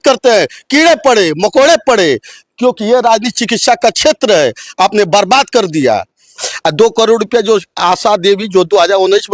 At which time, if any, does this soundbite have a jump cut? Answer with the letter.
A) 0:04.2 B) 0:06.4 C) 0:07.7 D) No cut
B